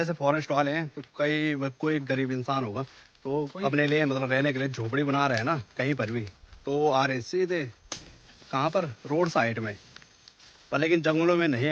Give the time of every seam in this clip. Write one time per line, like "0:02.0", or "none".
none

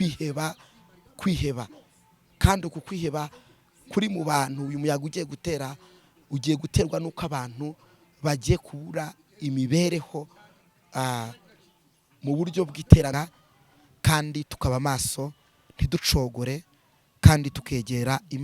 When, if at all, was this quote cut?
0:13.1

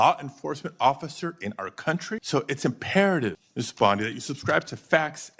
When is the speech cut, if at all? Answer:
0:02.2
0:03.4

